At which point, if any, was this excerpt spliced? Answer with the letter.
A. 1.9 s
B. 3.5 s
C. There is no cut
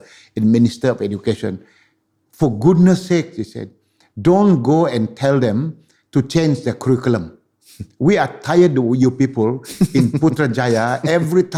C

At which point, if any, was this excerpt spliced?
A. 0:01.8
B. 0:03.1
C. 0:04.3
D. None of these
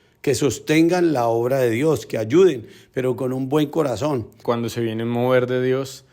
C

